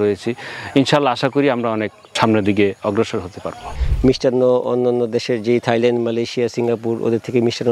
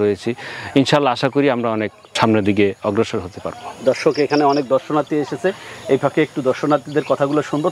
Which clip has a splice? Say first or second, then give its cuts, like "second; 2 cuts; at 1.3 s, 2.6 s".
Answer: first; 1 cut; at 3.8 s